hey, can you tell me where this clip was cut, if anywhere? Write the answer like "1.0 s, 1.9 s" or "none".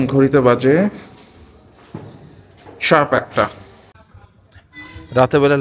3.9 s